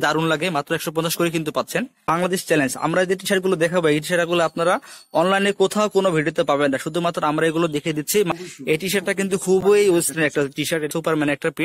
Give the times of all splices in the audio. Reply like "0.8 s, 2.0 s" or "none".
2.1 s, 8.3 s, 10.9 s